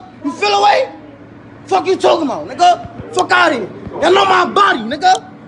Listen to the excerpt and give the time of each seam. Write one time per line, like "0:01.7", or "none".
none